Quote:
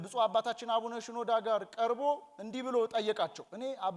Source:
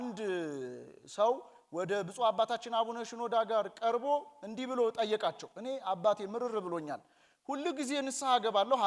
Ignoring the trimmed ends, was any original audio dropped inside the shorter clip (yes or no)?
no